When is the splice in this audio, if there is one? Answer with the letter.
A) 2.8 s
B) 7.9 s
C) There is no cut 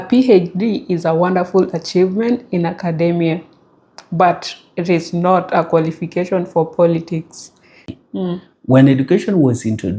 B